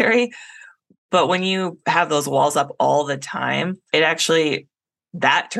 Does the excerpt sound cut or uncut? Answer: cut